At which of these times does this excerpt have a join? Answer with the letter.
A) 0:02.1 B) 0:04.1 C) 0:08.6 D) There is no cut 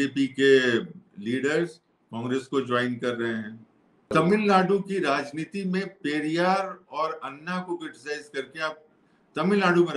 B